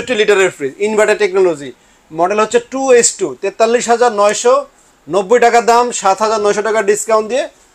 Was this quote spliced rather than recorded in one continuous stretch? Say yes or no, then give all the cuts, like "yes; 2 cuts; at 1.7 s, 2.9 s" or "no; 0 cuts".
no; 0 cuts